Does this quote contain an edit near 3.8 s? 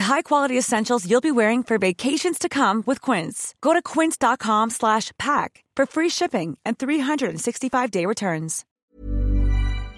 no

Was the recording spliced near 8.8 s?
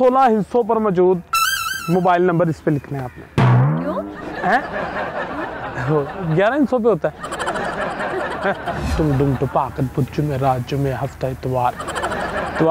yes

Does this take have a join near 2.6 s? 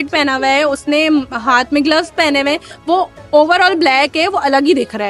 no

